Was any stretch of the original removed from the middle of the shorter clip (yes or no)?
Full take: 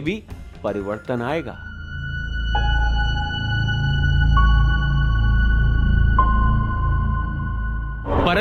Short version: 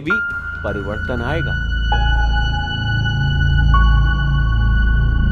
yes